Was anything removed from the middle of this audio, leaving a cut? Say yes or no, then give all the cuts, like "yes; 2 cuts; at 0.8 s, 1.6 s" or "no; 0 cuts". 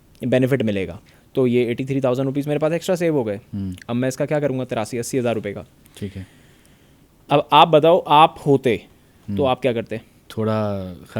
yes; 2 cuts; at 1.0 s, 10.2 s